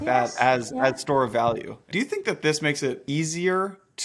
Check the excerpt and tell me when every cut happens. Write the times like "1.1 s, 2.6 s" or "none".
1.9 s, 3.0 s